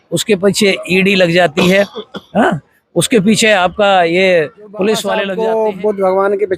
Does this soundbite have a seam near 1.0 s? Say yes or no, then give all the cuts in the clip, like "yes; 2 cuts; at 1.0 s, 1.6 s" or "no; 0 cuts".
no; 1 cut; at 5.3 s